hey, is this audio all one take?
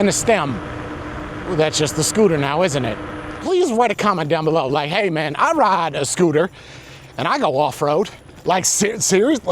no; 1 cut; at 3.3 s

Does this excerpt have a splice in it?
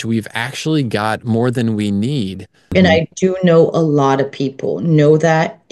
yes; 1 cut; at 2.7 s

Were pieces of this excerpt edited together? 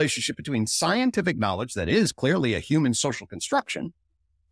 no; 0 cuts

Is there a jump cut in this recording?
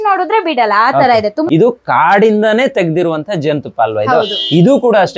yes; 1 cut; at 1.4 s

